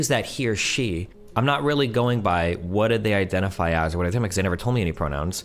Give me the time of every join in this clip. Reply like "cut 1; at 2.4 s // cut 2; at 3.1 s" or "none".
cut 1; at 1.1 s